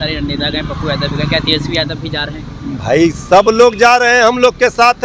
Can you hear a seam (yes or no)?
no